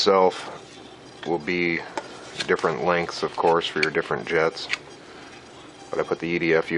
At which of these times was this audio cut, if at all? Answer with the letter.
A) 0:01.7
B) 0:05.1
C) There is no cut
A